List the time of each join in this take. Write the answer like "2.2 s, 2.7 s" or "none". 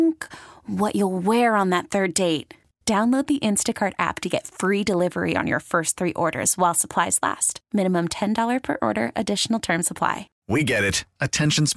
10.3 s